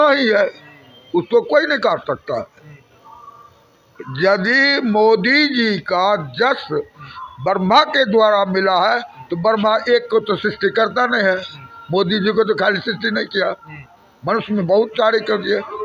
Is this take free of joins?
yes; 0 cuts

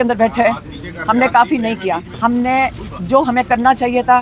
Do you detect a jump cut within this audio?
yes; 1 cut; at 2.1 s

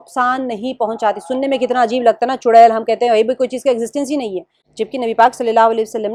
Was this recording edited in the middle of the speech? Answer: no; 0 cuts

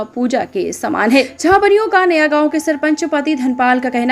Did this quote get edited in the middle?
yes; 1 cut; at 1.3 s

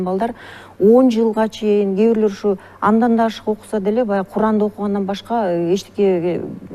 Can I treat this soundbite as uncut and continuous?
yes; 0 cuts

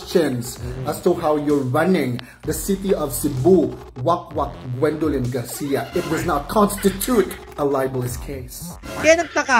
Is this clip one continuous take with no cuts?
no; 1 cut; at 8.7 s

